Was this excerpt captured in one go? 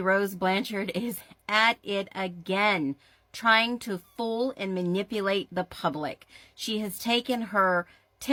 yes; 0 cuts

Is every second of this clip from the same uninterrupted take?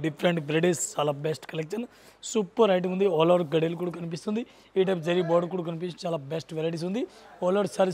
yes; 0 cuts

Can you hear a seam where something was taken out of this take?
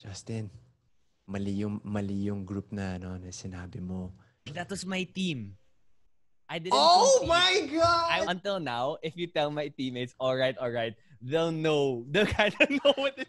yes; 2 cuts; at 4.5 s, 8.2 s

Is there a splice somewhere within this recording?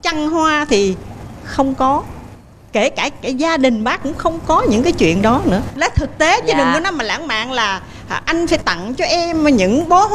yes; 1 cut; at 5.8 s

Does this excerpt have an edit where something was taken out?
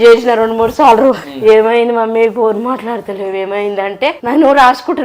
yes; 2 cuts; at 1.3 s, 4.2 s

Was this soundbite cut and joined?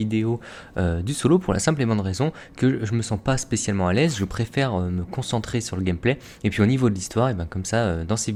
no; 0 cuts

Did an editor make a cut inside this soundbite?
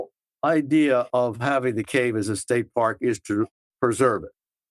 no; 0 cuts

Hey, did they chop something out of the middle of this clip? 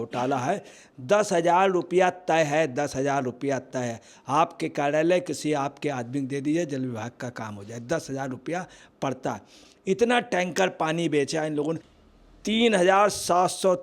yes; 1 cut; at 11.9 s

